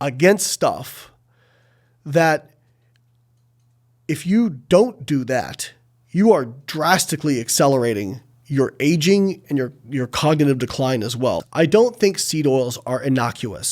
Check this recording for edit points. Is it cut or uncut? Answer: cut